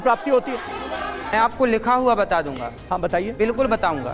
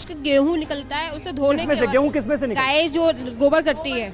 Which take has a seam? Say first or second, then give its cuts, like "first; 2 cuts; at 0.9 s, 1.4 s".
first; 1 cut; at 1.2 s